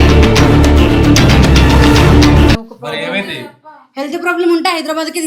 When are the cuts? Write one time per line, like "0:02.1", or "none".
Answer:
0:02.6